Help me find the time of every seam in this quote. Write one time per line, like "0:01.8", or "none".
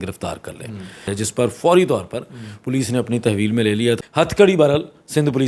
0:01.1
0:04.0